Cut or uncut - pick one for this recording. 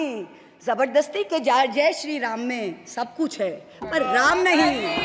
uncut